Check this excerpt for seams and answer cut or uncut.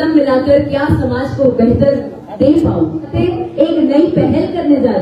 cut